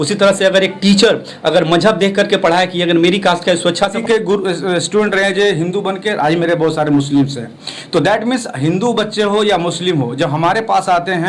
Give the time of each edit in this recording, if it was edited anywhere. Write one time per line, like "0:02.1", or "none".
0:03.8